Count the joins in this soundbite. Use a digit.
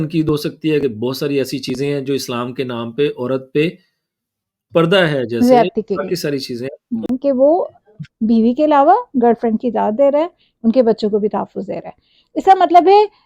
1